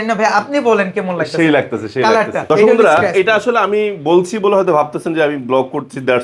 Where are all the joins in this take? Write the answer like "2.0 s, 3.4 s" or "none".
2.4 s